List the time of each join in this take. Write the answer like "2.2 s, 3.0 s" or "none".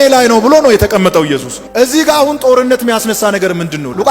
none